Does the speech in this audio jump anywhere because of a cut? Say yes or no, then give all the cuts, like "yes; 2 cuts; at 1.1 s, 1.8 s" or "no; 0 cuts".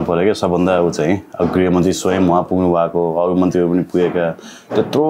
no; 0 cuts